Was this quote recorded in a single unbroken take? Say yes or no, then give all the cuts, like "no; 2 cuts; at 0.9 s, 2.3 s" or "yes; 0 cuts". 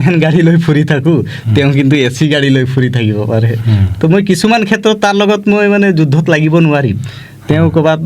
yes; 0 cuts